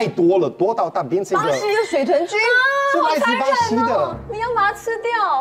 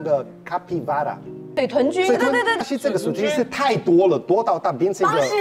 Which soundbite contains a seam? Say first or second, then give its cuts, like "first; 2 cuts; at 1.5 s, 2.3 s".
second; 2 cuts; at 1.4 s, 2.6 s